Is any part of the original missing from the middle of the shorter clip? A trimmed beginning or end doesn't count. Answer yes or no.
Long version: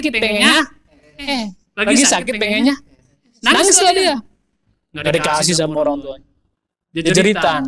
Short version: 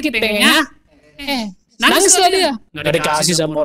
yes